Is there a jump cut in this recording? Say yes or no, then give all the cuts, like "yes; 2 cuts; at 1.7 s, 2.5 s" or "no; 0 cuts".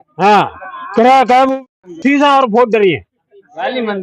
no; 0 cuts